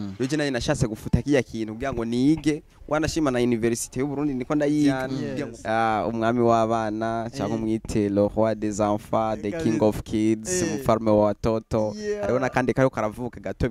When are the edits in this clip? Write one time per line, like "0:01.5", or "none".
0:05.1